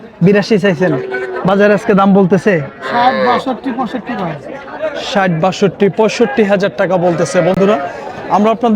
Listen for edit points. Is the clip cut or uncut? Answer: uncut